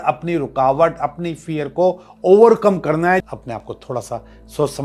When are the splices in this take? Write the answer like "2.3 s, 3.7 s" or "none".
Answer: 3.2 s